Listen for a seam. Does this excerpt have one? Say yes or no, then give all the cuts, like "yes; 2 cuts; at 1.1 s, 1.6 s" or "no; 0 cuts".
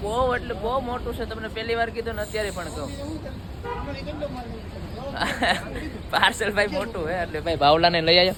no; 0 cuts